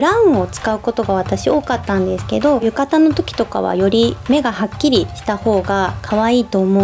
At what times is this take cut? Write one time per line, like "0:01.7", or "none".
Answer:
0:02.6
0:05.7